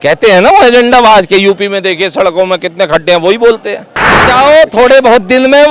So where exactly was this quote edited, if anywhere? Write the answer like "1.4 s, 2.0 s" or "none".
4.2 s